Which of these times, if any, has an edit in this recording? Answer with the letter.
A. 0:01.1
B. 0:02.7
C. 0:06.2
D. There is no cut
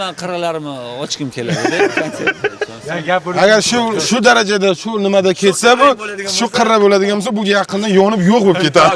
D